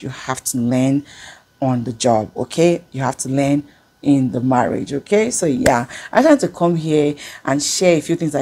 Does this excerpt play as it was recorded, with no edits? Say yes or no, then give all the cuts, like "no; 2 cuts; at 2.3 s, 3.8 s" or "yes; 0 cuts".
yes; 0 cuts